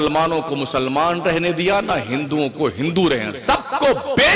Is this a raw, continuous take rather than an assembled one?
yes; 0 cuts

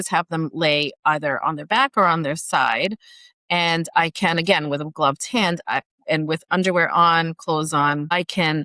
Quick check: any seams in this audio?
no; 0 cuts

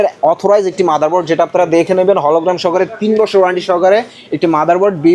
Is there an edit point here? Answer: no; 0 cuts

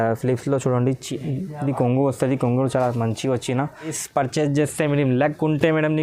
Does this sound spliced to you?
yes; 1 cut; at 4.0 s

